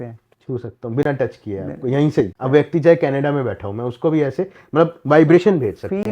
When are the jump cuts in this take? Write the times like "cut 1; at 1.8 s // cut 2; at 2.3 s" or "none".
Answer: cut 1; at 2.4 s